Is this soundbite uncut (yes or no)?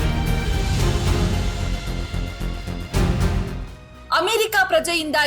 no